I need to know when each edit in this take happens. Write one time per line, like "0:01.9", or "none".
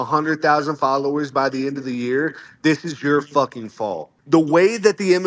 0:04.1